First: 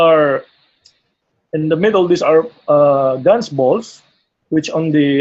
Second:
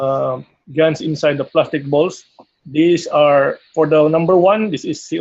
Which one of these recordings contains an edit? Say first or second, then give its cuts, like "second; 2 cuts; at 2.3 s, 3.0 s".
second; 1 cut; at 1.5 s